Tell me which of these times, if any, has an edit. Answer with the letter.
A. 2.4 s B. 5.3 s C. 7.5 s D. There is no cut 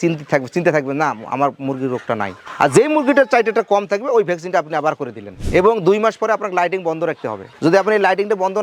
B